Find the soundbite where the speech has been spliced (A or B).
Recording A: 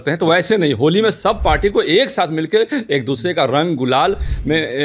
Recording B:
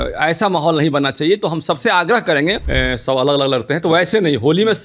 B